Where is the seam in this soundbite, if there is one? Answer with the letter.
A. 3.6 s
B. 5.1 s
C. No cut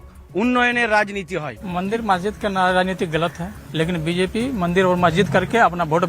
A